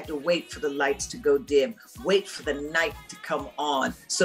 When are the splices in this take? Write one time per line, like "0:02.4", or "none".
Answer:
none